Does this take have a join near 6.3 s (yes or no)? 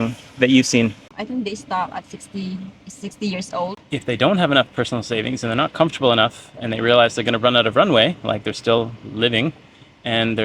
no